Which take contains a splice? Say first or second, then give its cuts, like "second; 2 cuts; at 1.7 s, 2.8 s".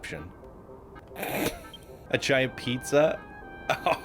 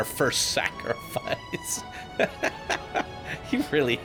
first; 2 cuts; at 1.0 s, 1.9 s